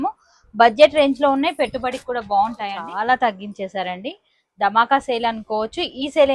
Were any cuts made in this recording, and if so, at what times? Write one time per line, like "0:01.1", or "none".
0:02.8